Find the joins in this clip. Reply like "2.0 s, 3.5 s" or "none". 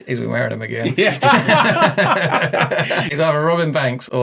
3.1 s